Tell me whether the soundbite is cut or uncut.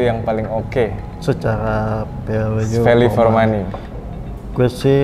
uncut